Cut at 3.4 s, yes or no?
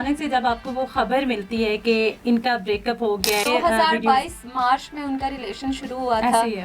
yes